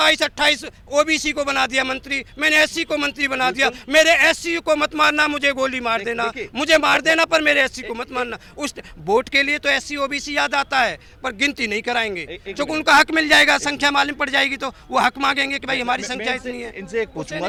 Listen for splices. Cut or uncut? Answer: uncut